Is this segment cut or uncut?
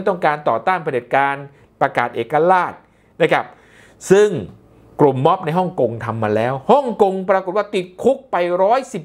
uncut